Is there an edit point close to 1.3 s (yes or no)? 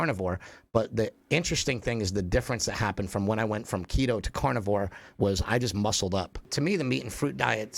no